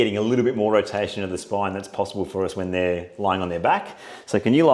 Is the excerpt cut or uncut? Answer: uncut